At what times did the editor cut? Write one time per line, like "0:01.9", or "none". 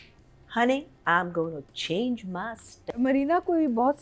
0:02.9